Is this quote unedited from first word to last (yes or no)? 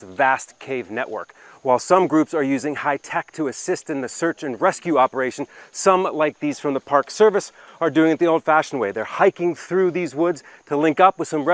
yes